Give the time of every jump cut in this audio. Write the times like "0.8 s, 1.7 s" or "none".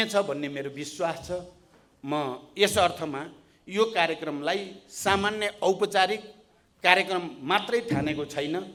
none